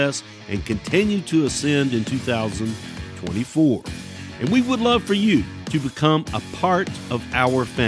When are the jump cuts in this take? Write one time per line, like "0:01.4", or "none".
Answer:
0:05.6
0:07.0